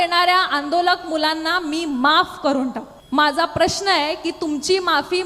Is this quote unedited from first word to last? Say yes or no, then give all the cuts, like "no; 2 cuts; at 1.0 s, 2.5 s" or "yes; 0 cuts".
no; 1 cut; at 2.9 s